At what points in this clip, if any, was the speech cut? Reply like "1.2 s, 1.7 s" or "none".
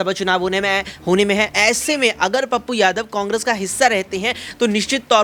none